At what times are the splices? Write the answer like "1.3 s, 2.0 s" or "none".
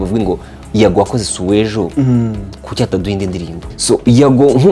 3.6 s

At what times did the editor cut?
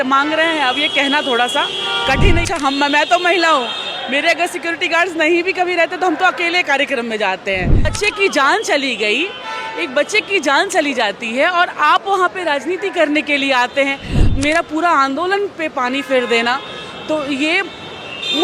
2.4 s, 7.9 s, 14.3 s

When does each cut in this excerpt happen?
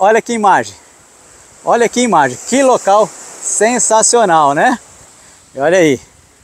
none

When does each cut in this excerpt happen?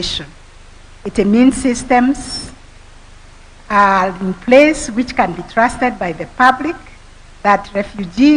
none

